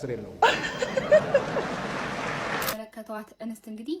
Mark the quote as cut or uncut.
cut